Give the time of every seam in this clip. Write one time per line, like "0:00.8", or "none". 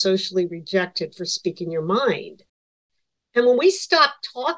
0:02.6

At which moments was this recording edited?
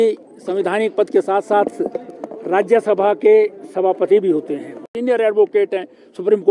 0:04.9

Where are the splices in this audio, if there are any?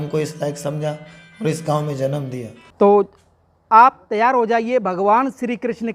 0:02.7

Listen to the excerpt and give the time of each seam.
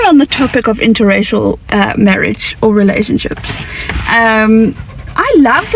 none

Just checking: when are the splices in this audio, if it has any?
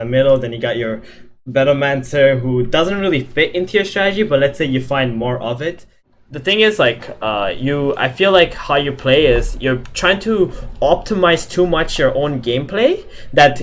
0:06.1

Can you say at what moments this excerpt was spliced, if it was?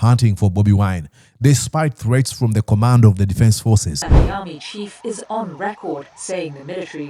0:04.1

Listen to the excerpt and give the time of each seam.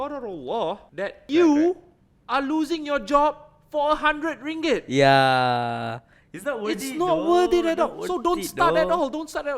0:01.2

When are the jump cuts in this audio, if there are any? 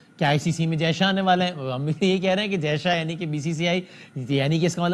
none

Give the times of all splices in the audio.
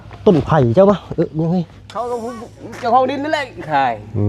0:02.2

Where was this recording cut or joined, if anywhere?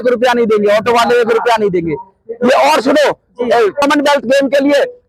0:03.8

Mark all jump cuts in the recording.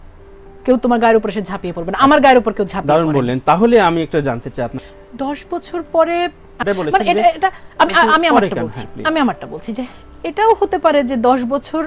none

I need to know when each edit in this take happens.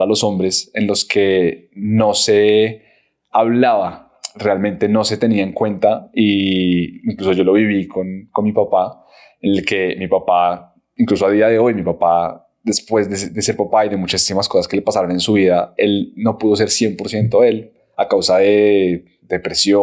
none

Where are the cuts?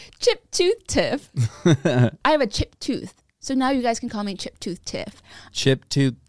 0:02.2

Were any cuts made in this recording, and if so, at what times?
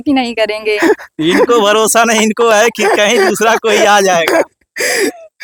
none

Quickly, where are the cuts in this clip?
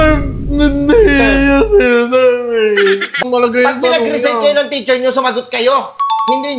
0:03.2

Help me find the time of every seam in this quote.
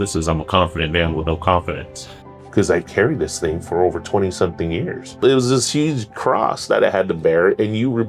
0:02.4
0:05.2

